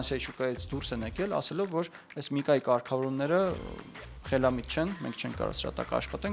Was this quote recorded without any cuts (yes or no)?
yes